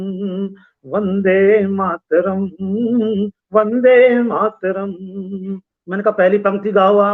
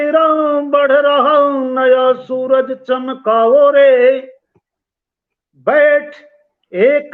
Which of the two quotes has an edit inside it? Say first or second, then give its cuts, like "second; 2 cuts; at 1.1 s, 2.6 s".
first; 1 cut; at 5.7 s